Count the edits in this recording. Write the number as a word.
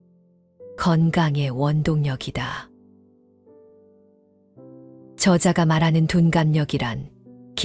two